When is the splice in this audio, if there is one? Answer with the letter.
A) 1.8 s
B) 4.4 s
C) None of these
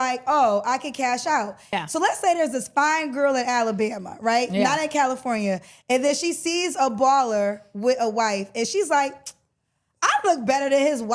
A